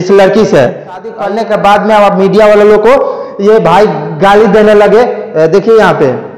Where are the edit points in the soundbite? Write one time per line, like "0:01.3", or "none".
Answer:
0:01.1